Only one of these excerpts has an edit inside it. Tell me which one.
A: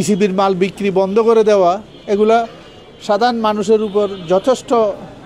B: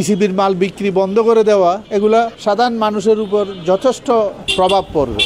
B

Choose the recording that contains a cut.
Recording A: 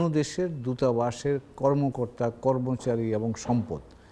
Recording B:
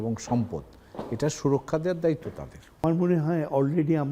B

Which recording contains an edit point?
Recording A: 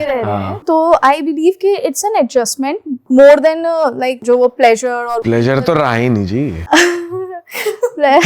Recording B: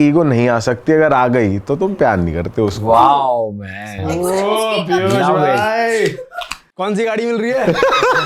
A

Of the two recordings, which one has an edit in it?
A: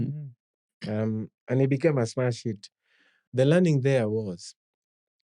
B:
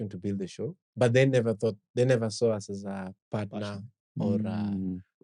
A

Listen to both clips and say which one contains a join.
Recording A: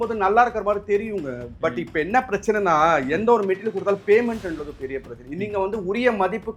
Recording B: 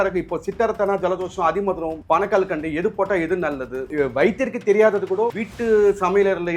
B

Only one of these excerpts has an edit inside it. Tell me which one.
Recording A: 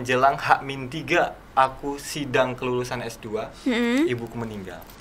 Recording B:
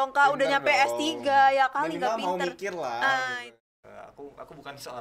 B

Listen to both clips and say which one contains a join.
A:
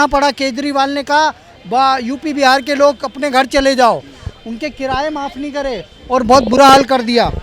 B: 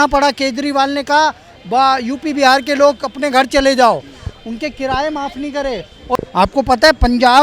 B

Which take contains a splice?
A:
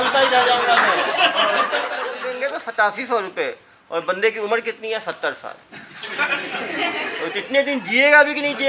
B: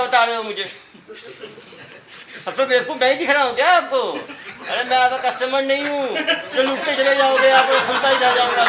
A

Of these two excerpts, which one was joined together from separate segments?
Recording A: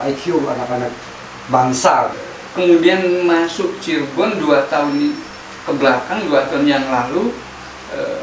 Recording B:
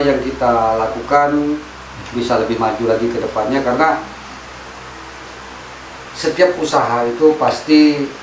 A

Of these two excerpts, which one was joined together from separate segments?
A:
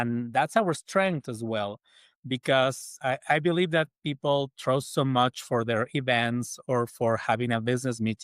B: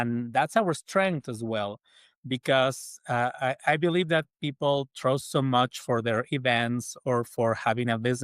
A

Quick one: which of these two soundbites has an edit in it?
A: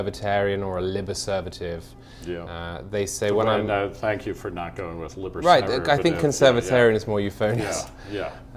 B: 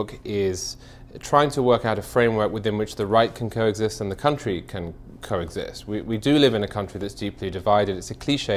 A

